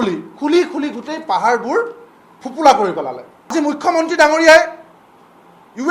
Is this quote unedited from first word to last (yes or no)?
no